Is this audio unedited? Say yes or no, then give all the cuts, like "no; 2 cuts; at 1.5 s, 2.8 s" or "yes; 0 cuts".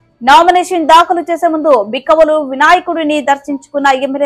yes; 0 cuts